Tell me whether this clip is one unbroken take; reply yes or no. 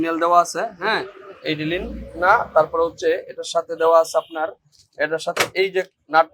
yes